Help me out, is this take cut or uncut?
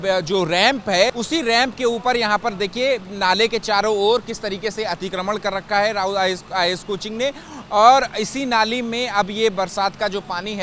cut